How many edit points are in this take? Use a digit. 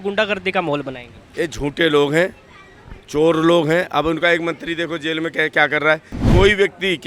1